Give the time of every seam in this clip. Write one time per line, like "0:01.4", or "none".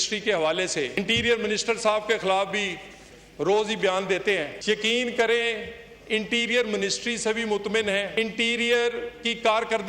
0:00.9
0:04.5
0:08.1